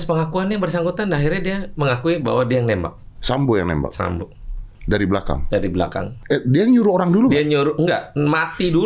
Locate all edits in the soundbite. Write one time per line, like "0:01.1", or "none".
0:04.8
0:06.1